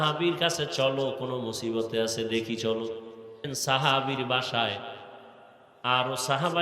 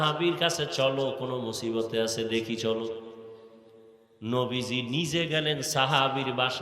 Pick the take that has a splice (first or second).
first